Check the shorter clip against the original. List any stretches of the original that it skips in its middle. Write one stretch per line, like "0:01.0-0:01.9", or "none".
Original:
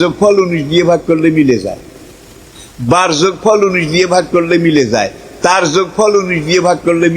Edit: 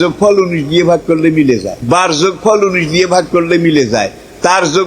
0:01.7-0:02.7

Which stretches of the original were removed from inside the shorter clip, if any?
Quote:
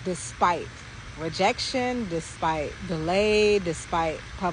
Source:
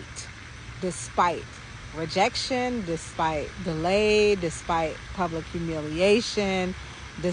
none

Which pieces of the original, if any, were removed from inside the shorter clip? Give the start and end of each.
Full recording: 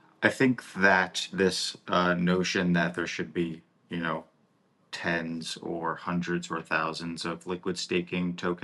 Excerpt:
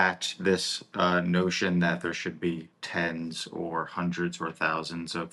0:03.7-0:04.9

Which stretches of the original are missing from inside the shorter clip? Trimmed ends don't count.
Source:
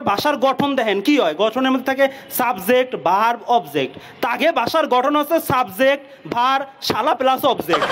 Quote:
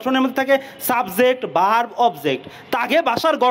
none

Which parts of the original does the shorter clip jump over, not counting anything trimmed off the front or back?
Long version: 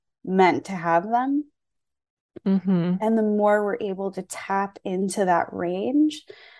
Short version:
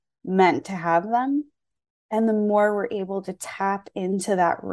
0:02.1-0:03.0

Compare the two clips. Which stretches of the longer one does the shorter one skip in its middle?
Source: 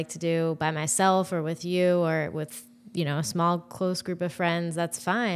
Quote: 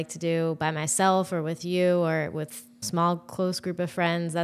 0:02.8-0:03.3

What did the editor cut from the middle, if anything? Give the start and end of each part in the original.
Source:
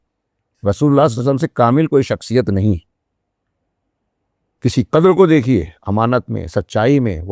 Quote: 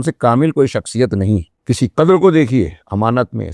0:02.9-0:04.5

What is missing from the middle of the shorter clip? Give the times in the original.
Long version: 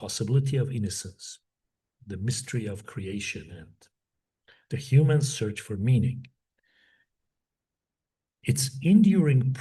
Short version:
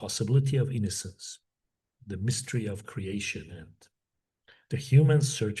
none

